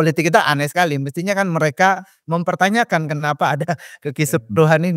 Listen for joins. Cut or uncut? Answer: uncut